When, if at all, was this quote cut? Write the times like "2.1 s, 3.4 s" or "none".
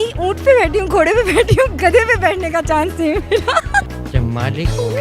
3.9 s